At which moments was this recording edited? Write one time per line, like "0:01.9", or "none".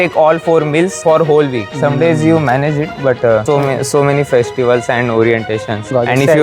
none

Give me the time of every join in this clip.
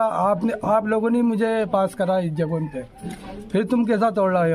none

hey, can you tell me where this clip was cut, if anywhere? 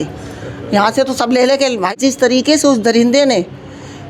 0:01.9

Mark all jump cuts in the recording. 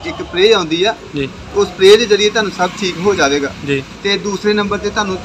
0:03.9

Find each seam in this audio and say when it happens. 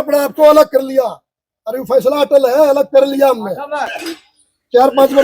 0:04.0

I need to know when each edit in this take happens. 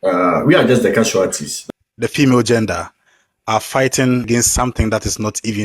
0:01.5
0:04.3

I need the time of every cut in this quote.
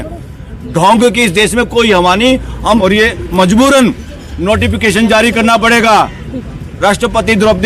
0:02.8

